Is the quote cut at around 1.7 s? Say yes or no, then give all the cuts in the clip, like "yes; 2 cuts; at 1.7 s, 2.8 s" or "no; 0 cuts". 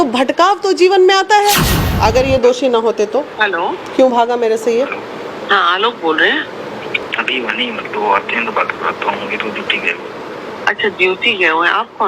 yes; 2 cuts; at 1.7 s, 7.0 s